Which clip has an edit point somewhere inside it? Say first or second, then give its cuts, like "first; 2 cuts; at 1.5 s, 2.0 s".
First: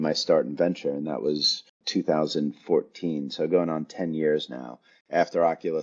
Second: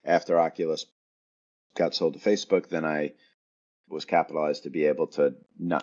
first; 1 cut; at 1.7 s